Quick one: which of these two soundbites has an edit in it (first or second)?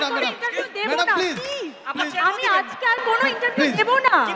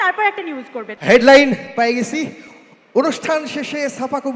second